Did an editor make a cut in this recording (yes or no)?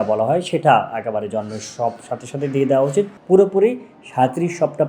yes